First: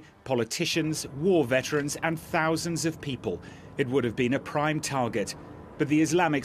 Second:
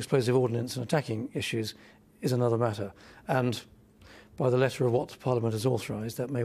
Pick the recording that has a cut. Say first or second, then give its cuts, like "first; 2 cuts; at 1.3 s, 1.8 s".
second; 1 cut; at 4.7 s